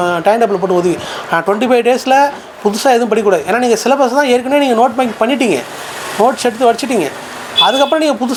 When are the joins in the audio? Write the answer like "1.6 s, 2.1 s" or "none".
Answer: none